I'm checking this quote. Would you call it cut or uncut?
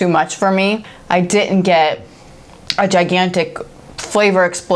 cut